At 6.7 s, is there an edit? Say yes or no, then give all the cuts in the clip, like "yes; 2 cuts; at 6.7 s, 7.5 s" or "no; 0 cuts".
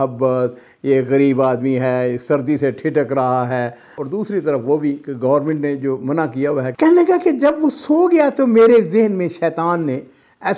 yes; 2 cuts; at 3.9 s, 6.7 s